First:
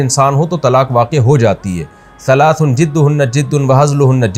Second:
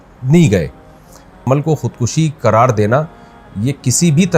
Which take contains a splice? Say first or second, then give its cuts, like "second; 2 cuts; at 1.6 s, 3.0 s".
second; 1 cut; at 1.4 s